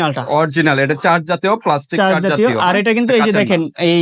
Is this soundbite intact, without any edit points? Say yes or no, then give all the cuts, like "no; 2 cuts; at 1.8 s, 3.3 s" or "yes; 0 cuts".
yes; 0 cuts